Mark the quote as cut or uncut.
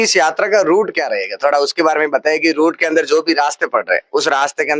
uncut